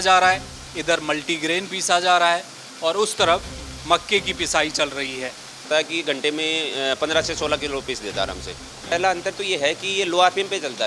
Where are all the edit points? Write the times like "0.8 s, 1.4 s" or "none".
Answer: 5.7 s, 8.9 s